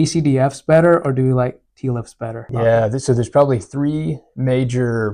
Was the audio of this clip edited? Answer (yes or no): yes